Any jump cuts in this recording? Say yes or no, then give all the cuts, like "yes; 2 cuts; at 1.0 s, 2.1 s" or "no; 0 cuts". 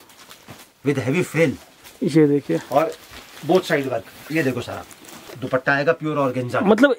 yes; 1 cut; at 5.3 s